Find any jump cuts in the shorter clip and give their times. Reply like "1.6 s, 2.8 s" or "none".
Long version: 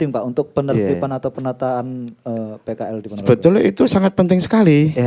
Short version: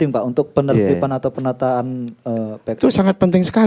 2.8 s